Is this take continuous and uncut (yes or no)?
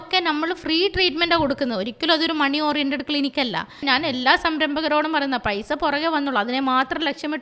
no